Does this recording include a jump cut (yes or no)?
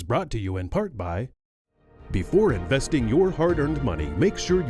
yes